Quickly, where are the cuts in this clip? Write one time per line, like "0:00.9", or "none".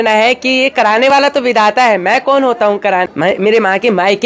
0:03.0